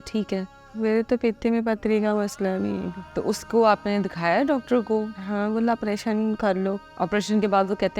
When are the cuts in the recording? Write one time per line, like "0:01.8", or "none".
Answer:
0:03.0
0:06.9